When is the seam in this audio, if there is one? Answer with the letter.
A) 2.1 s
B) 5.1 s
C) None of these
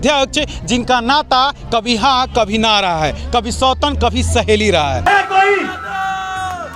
B